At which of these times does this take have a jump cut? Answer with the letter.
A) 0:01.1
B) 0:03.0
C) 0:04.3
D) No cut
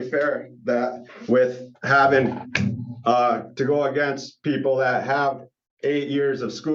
D